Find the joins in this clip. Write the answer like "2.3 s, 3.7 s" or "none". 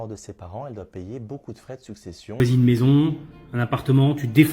2.4 s